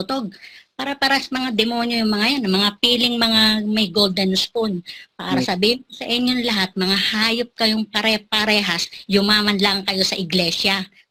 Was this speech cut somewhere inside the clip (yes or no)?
no